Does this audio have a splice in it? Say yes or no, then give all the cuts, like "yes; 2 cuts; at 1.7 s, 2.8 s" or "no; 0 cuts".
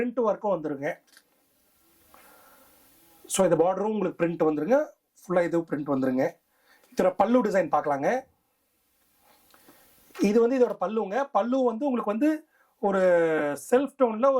no; 0 cuts